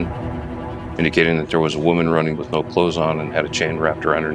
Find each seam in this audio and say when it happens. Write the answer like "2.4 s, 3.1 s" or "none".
2.3 s